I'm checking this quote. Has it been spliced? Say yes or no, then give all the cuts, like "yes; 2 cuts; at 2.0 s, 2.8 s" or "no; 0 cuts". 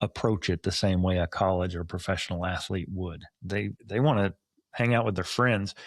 yes; 1 cut; at 3.8 s